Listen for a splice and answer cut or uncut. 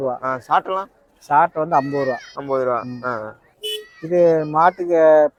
uncut